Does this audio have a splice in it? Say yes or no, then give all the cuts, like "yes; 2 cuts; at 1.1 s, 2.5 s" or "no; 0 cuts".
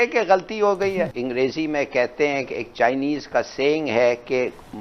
yes; 1 cut; at 1.1 s